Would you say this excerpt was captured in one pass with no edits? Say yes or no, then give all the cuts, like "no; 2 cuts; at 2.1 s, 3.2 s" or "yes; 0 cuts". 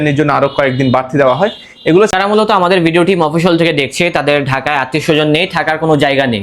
no; 1 cut; at 2.1 s